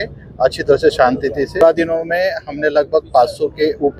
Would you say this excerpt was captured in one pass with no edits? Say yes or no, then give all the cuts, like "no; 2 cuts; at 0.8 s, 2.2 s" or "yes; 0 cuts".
no; 1 cut; at 1.6 s